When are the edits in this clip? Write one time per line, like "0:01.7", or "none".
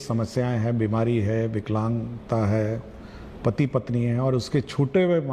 none